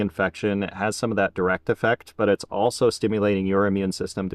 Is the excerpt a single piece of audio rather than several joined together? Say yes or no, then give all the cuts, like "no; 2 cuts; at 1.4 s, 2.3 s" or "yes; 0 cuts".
yes; 0 cuts